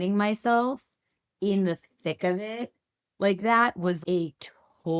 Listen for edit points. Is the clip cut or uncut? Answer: cut